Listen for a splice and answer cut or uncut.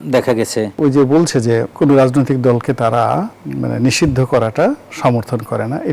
cut